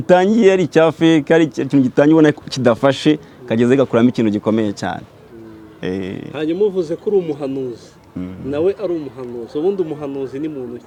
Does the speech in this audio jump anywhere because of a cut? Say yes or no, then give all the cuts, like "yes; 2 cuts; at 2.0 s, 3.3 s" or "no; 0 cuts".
no; 0 cuts